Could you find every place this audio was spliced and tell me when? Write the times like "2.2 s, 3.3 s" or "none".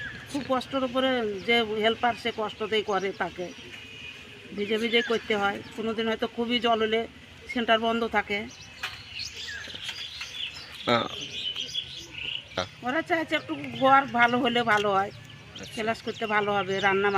12.4 s